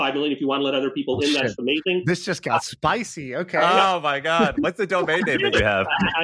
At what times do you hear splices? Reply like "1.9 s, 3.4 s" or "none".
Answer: none

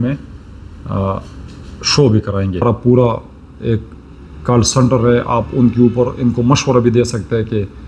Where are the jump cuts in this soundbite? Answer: 2.6 s

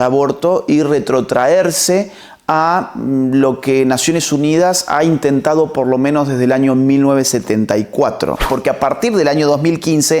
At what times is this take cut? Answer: 8.5 s

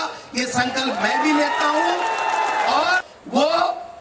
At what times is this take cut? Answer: 3.1 s

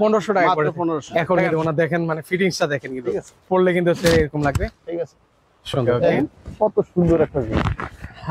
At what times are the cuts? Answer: 1.1 s, 6.2 s

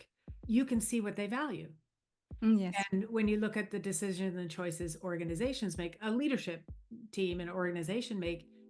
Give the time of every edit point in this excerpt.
none

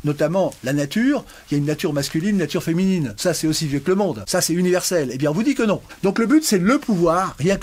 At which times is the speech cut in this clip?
3.1 s, 4.2 s, 5.9 s

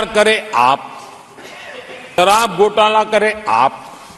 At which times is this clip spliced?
2.2 s

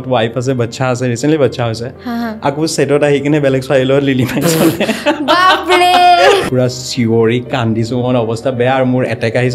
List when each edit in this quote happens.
6.4 s

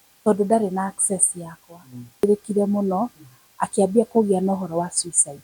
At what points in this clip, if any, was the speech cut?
2.2 s

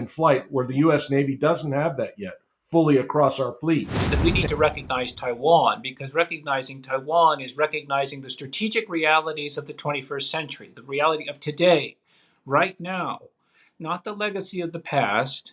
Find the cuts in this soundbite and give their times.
4.0 s

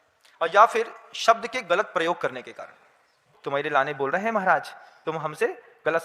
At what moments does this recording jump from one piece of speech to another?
3.3 s

